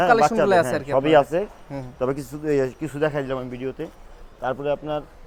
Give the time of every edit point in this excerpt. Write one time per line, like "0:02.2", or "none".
none